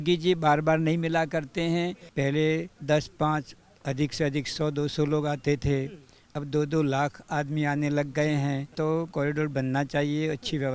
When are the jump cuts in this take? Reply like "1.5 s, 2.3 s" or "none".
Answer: 2.0 s, 2.7 s, 9.1 s